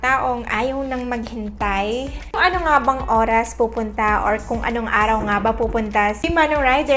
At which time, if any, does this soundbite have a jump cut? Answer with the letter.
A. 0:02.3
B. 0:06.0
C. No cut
C